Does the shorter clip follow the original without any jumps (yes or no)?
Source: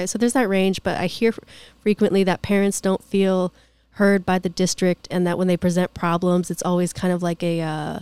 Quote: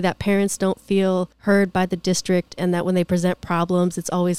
no